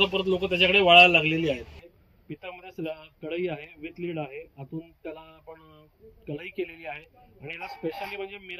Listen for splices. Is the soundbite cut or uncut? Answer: cut